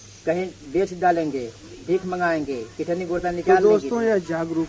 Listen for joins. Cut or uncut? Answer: uncut